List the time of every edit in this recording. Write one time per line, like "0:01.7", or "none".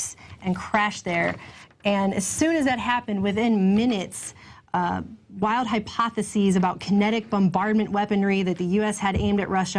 0:08.8